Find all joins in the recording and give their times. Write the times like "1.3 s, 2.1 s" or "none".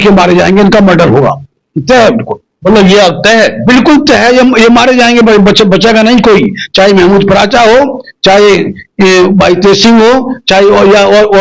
none